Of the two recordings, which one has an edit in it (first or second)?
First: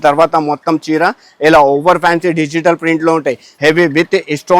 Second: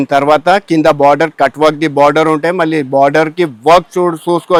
first